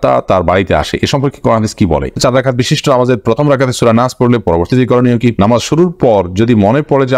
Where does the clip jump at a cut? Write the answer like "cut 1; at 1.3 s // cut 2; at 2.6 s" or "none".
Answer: cut 1; at 2.2 s // cut 2; at 5.4 s